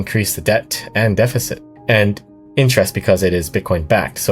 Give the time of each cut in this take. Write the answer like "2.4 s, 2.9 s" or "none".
1.6 s